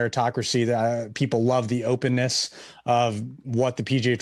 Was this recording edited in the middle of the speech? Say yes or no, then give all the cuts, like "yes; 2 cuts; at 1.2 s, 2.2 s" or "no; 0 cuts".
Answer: no; 0 cuts